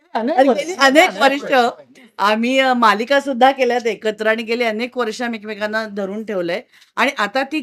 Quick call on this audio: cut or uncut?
uncut